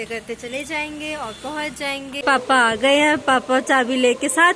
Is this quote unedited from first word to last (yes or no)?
no